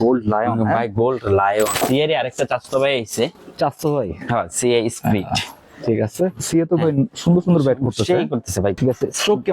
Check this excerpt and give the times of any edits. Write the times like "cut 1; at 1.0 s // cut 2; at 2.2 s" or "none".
cut 1; at 1.8 s // cut 2; at 6.4 s // cut 3; at 8.8 s